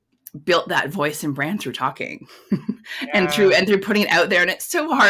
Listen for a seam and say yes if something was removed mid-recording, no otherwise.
no